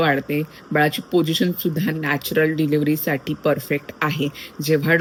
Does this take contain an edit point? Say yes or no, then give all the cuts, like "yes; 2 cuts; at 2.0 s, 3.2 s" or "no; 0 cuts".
no; 0 cuts